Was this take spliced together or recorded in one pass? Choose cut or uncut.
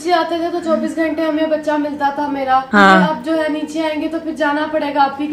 uncut